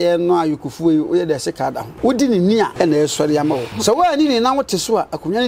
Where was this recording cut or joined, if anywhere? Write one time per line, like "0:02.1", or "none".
0:01.9
0:02.7
0:03.7